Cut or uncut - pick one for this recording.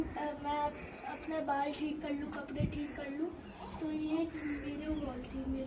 uncut